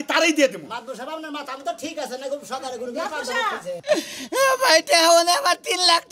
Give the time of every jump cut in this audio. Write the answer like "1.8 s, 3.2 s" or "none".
3.7 s